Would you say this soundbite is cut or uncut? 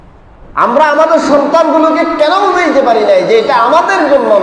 uncut